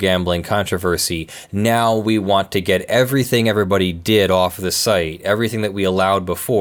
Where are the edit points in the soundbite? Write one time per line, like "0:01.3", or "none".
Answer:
none